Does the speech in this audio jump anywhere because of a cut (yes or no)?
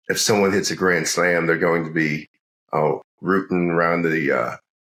no